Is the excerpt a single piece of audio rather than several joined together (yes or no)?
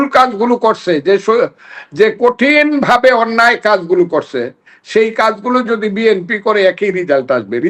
yes